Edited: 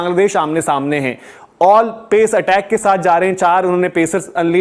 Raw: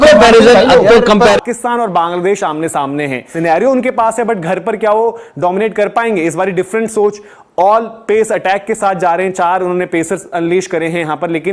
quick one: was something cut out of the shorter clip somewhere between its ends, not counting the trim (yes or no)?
yes